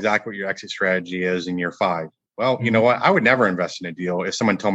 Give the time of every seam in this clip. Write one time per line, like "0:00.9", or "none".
none

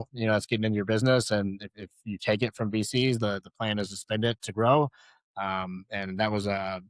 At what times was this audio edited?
none

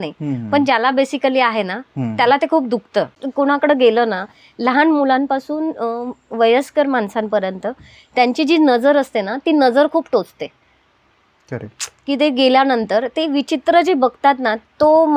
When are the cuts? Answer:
0:03.2

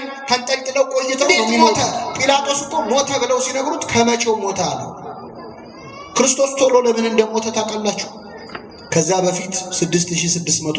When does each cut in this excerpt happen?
0:01.7

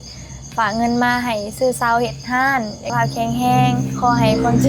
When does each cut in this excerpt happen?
0:02.9

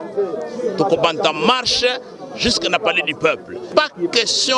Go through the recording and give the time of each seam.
0:03.7

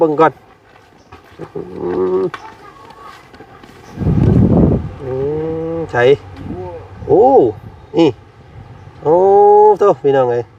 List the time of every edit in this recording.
0:04.0

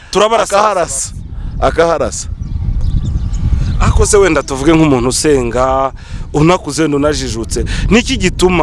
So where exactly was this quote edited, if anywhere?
none

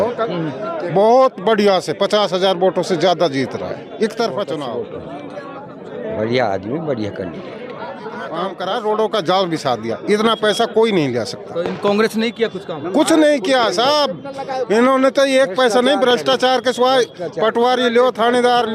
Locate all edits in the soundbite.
0:04.7
0:08.5

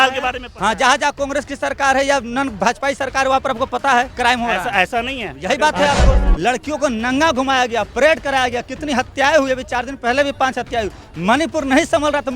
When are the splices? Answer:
0:06.2

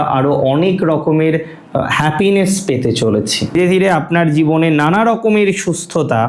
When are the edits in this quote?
0:03.5

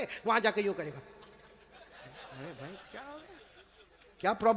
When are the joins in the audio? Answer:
none

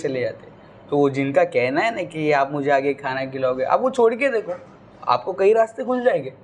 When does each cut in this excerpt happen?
none

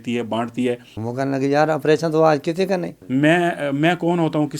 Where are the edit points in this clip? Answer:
0:00.9
0:03.0

